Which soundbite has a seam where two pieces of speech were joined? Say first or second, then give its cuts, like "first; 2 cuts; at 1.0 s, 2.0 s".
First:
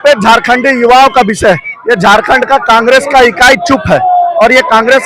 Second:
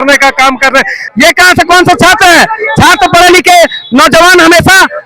second; 1 cut; at 1.0 s